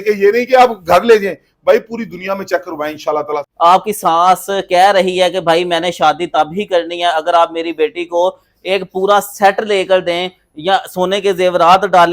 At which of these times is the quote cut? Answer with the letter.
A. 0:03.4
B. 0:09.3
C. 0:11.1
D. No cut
A